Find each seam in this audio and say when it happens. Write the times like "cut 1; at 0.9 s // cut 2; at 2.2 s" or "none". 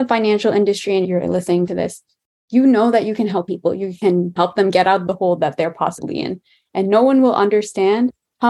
cut 1; at 1.0 s